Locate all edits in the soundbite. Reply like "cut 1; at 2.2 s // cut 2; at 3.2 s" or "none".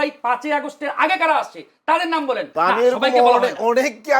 cut 1; at 2.5 s